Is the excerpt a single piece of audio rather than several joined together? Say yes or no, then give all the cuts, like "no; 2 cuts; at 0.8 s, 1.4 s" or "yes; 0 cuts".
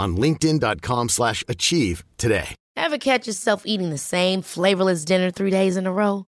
no; 1 cut; at 2.6 s